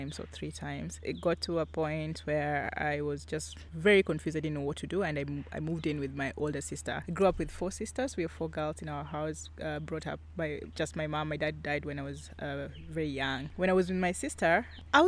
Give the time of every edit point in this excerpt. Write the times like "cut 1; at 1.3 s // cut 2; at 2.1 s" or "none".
none